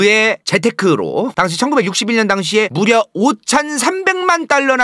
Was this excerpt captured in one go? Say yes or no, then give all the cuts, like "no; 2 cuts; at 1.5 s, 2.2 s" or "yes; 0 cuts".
no; 1 cut; at 1.3 s